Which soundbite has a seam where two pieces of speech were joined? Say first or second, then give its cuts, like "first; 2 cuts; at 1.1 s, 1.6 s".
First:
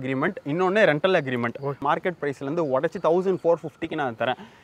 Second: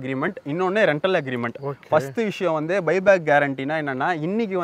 first; 1 cut; at 1.8 s